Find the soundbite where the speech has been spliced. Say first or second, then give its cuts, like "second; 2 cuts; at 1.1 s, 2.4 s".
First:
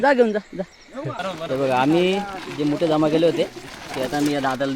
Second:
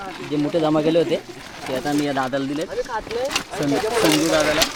first; 1 cut; at 1.3 s